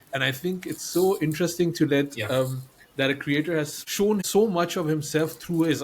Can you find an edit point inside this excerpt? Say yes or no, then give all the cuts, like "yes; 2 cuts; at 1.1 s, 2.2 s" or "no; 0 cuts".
yes; 1 cut; at 4.2 s